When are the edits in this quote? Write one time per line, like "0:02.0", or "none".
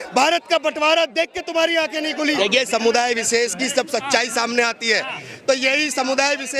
0:02.4